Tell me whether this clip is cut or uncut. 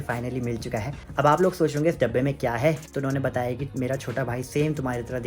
cut